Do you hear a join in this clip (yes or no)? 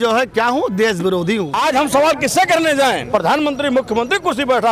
yes